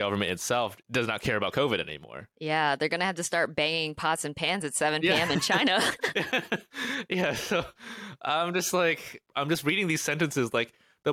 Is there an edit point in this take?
yes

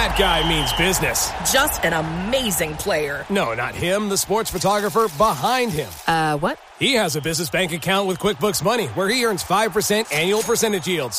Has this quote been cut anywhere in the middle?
no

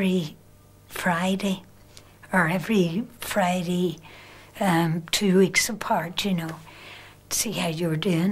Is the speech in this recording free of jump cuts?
yes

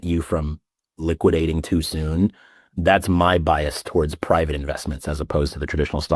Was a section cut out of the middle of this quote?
yes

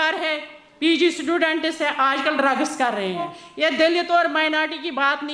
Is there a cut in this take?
yes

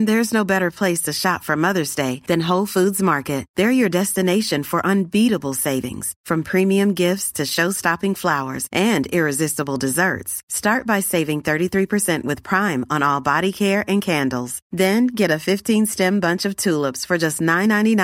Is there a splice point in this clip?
no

